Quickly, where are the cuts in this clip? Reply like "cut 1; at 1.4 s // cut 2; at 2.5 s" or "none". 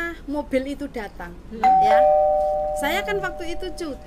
cut 1; at 1.6 s // cut 2; at 2.8 s